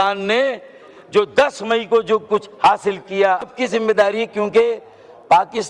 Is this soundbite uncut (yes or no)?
no